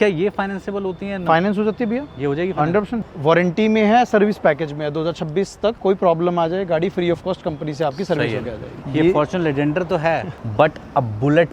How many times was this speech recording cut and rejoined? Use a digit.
3